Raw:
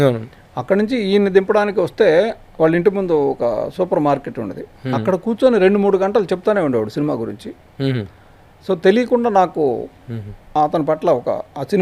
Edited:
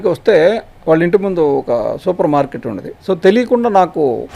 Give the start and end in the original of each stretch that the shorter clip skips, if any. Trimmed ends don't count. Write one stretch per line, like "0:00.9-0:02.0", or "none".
0:04.6-0:08.5